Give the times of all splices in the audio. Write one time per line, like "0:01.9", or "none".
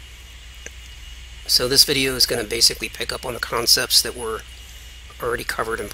none